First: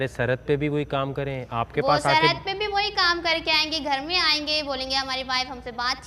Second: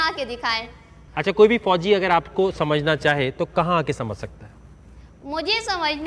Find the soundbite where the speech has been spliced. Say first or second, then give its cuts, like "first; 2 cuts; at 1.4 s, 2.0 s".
first; 1 cut; at 1.3 s